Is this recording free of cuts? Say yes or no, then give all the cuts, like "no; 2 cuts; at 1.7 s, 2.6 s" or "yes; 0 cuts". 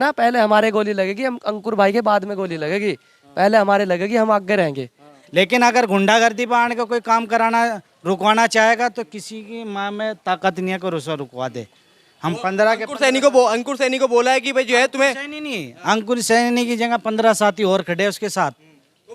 no; 1 cut; at 5.1 s